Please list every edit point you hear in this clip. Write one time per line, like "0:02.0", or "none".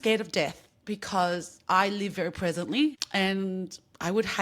0:03.0